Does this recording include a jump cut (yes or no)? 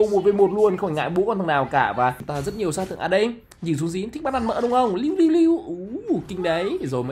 yes